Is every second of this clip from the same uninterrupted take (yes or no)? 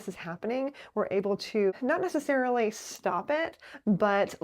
no